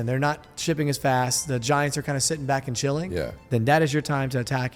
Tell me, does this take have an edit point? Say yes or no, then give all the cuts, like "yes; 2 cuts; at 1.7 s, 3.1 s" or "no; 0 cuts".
no; 0 cuts